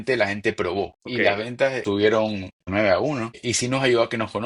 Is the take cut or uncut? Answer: cut